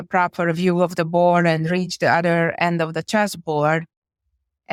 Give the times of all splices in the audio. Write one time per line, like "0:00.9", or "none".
none